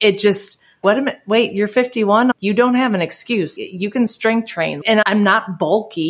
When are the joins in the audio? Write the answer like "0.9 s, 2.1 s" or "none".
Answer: 0.8 s, 2.3 s, 3.5 s, 4.9 s